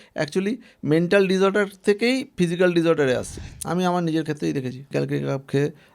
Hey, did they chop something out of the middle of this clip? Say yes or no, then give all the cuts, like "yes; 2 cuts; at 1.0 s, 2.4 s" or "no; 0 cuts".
yes; 2 cuts; at 3.3 s, 4.9 s